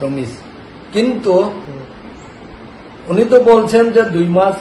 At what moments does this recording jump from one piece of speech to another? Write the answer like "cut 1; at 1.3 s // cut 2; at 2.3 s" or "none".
cut 1; at 1.6 s